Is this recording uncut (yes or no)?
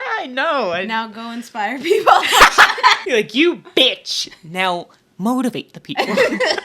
no